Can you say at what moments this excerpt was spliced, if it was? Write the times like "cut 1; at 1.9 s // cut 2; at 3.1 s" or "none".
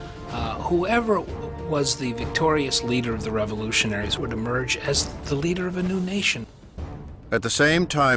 none